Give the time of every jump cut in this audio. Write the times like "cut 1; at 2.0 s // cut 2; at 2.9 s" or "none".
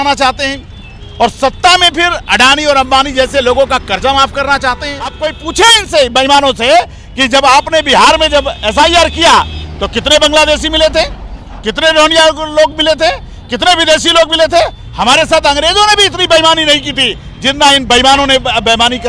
cut 1; at 5.3 s // cut 2; at 14.8 s